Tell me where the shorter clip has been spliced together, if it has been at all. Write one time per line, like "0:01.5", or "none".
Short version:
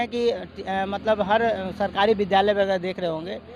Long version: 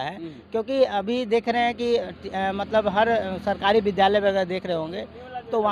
none